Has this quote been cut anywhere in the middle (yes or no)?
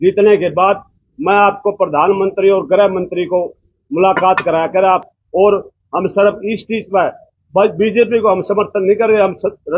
yes